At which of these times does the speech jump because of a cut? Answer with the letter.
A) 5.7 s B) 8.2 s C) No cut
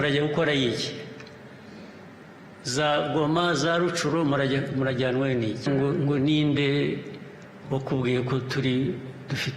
A